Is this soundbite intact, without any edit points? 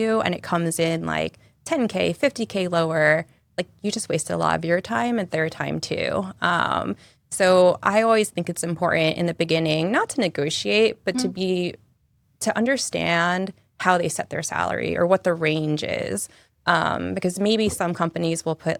yes; 0 cuts

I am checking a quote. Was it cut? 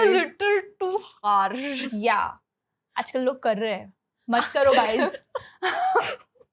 no; 0 cuts

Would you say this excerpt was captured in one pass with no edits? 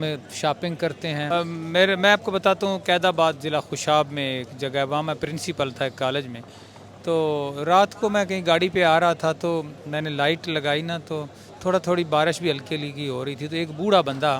no; 1 cut; at 1.2 s

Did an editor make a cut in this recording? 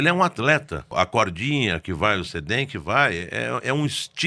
yes; 1 cut; at 0.9 s

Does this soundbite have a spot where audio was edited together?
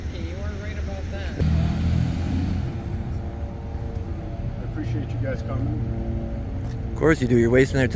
yes; 1 cut; at 1.4 s

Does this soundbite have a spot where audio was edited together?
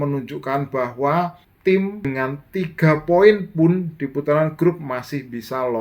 yes; 2 cuts; at 1.5 s, 2.1 s

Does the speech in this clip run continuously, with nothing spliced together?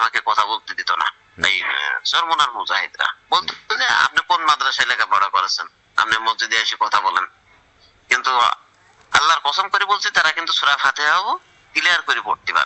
yes; 0 cuts

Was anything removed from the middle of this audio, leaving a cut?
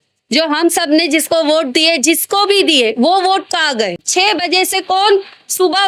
yes; 1 cut; at 4.0 s

